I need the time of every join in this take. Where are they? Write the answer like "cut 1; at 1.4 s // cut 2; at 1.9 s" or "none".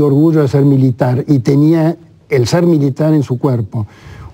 none